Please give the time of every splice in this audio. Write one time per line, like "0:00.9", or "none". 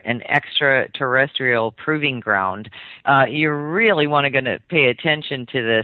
0:04.2